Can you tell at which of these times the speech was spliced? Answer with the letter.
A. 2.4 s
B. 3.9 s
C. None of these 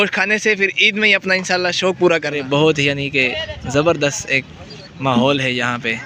A